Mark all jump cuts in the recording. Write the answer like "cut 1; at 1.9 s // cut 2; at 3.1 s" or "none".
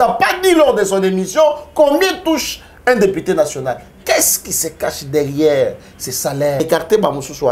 cut 1; at 6.6 s